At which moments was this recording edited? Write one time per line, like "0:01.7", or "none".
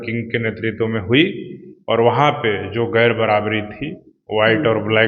none